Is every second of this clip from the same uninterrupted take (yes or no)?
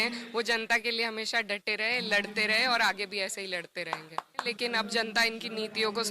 no